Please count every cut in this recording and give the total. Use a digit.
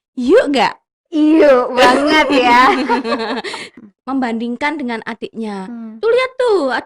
1